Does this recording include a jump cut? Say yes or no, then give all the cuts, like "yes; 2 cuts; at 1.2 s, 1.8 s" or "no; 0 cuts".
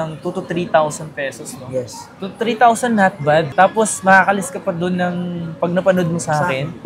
no; 0 cuts